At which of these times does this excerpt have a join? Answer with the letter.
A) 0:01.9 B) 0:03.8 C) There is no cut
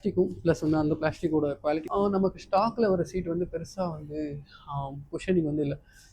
A